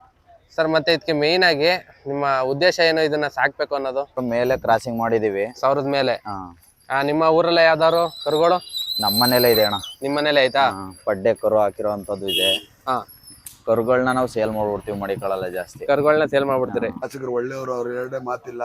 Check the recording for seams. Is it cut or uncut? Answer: cut